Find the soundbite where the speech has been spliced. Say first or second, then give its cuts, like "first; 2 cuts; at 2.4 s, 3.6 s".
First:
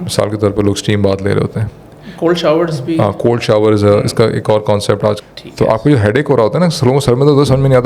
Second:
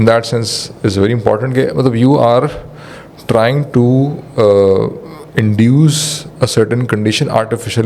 first; 1 cut; at 5.2 s